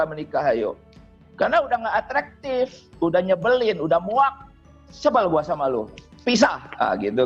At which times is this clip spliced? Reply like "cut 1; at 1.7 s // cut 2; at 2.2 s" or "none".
none